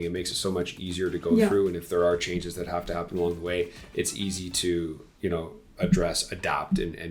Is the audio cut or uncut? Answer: uncut